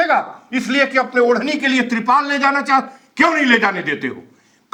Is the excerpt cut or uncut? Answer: uncut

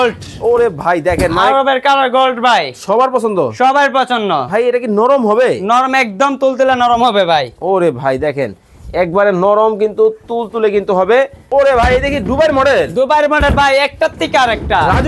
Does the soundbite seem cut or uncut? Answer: cut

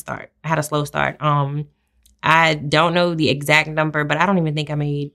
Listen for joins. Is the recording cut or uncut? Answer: uncut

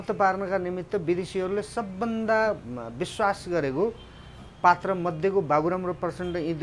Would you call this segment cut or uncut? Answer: uncut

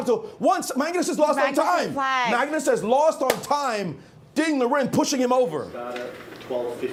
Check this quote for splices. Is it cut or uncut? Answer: uncut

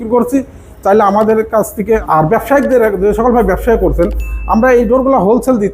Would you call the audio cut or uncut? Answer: cut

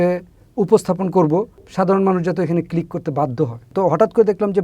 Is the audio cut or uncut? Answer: cut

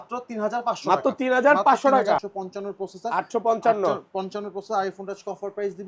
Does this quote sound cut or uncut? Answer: cut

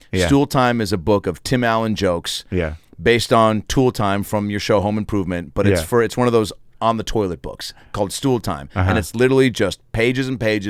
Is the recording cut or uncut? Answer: uncut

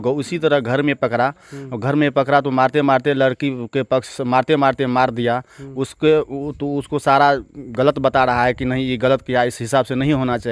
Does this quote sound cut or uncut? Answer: uncut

